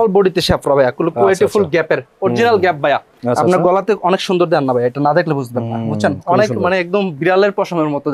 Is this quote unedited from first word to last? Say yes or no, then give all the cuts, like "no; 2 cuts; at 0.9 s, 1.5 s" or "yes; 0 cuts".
no; 1 cut; at 3.1 s